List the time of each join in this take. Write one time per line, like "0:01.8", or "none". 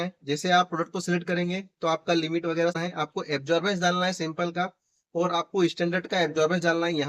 0:02.8